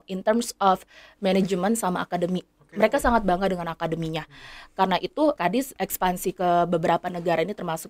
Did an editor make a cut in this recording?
yes; 1 cut; at 5.4 s

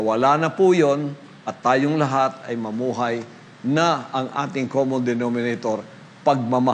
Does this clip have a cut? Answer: no; 0 cuts

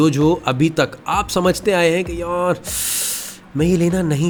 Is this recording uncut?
yes; 0 cuts

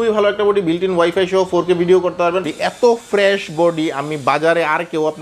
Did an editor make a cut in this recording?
yes; 1 cut; at 2.5 s

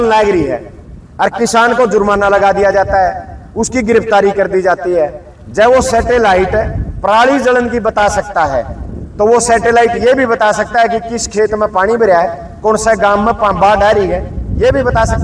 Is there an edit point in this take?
no; 0 cuts

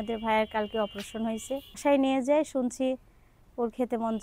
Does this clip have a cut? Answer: yes; 1 cut; at 1.8 s

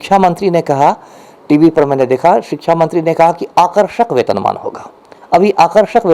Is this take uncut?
yes; 0 cuts

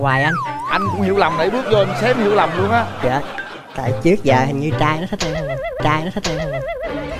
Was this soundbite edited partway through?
no; 0 cuts

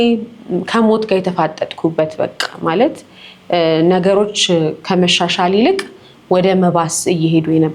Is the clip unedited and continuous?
yes; 0 cuts

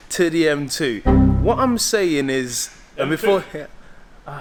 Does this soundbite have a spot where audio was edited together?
no; 0 cuts

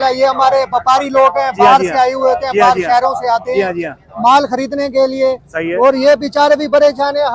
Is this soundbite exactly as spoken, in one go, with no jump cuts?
yes; 0 cuts

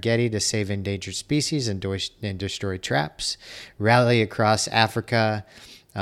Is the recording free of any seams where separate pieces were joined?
yes; 0 cuts

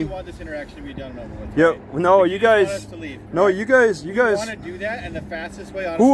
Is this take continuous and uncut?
yes; 0 cuts

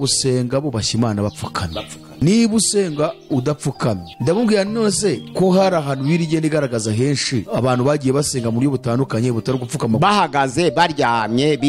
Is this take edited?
yes; 4 cuts; at 2.0 s, 4.0 s, 5.2 s, 7.5 s

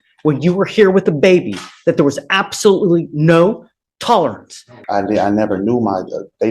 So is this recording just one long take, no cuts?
no; 1 cut; at 4.8 s

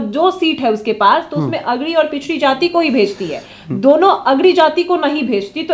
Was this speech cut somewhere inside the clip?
no; 0 cuts

